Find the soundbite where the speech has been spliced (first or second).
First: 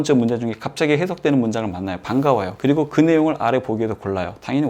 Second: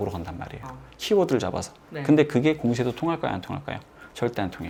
first